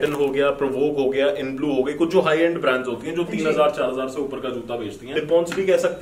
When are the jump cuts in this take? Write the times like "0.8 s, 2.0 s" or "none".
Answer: 5.1 s